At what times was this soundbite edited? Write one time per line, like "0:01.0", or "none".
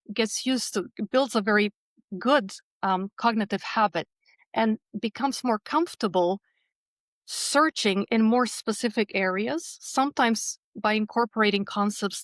none